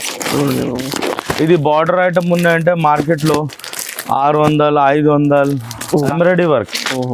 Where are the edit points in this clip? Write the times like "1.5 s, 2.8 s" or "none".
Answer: 6.1 s